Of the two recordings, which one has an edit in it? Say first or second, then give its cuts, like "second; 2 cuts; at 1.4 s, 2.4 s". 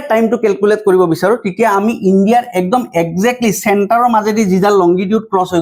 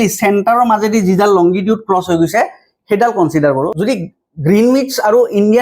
second; 1 cut; at 3.7 s